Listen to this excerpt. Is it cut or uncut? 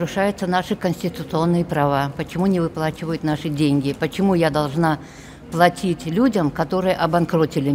uncut